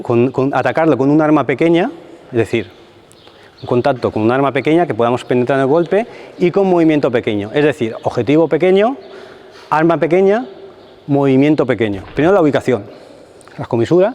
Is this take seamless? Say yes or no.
no